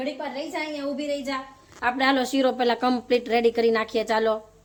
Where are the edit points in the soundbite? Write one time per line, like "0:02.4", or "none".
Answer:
none